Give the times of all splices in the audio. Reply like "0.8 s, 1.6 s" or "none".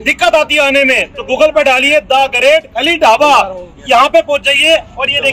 none